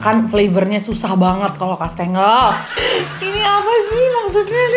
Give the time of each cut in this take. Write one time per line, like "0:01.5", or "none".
0:02.7